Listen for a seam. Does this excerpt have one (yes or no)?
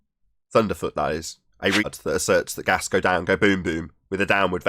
yes